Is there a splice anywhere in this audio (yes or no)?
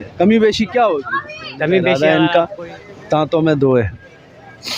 yes